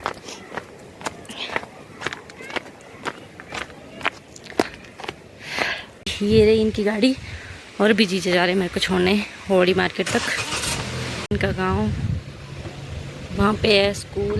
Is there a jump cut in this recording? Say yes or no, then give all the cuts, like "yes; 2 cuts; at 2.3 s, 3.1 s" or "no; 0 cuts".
no; 0 cuts